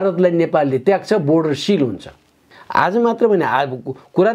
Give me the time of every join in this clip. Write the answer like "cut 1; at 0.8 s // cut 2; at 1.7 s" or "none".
cut 1; at 2.5 s